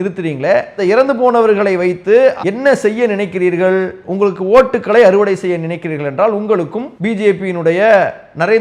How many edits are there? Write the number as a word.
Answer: two